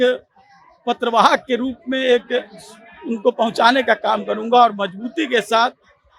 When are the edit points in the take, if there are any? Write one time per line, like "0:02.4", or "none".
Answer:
none